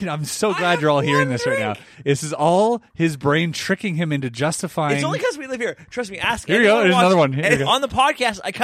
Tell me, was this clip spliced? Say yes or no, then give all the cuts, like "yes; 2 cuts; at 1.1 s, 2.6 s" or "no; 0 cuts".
yes; 1 cut; at 7.7 s